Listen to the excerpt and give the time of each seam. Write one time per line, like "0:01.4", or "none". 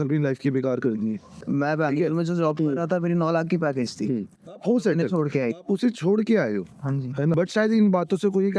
0:01.4
0:07.3